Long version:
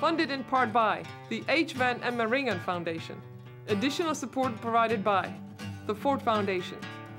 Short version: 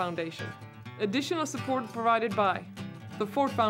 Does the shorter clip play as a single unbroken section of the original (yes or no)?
yes